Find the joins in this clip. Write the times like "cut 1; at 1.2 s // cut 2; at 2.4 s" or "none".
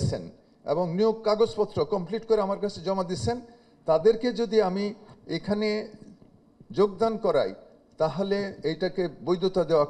none

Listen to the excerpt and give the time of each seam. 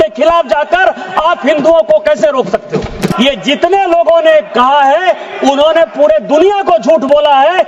cut 1; at 3.1 s

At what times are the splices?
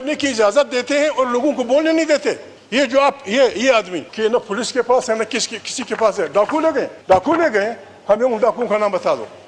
cut 1; at 2.5 s // cut 2; at 4.0 s // cut 3; at 7.0 s

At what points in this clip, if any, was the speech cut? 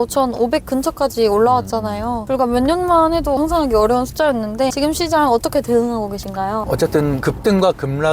cut 1; at 3.4 s // cut 2; at 4.7 s // cut 3; at 6.6 s

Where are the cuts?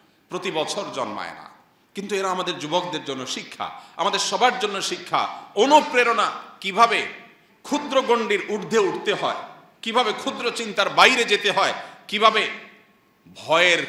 none

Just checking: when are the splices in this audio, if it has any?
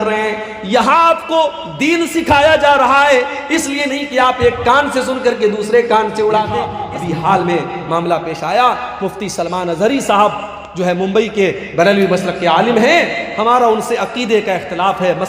cut 1; at 6.8 s

